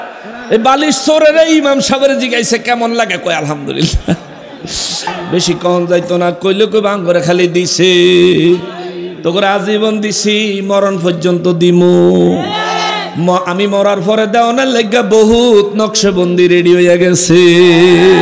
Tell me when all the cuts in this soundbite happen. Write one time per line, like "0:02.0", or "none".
0:05.1